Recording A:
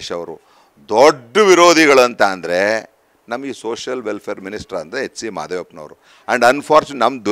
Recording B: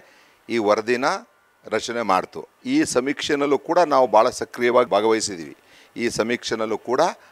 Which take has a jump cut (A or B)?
B